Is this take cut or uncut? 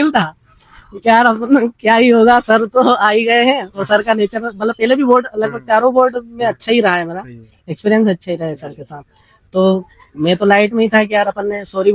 uncut